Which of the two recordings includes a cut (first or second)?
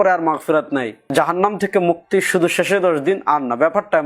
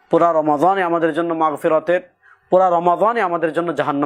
first